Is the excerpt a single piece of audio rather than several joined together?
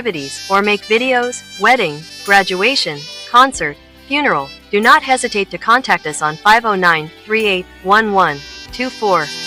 yes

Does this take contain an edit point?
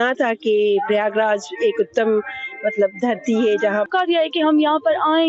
yes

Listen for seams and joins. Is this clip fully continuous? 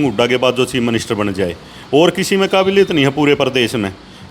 yes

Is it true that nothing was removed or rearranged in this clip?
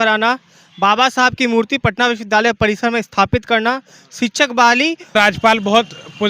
no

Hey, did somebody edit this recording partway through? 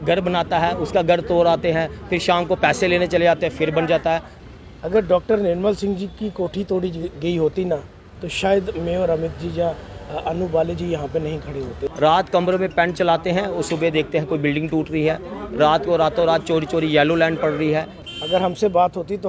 yes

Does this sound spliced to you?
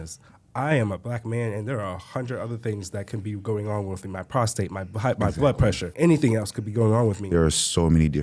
yes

